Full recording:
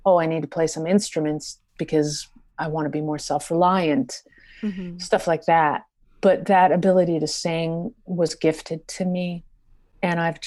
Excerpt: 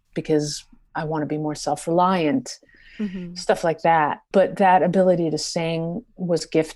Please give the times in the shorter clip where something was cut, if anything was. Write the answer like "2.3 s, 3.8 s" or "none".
4.2 s